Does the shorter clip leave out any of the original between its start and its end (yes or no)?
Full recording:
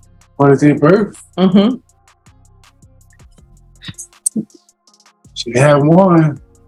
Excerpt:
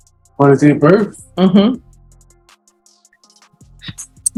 no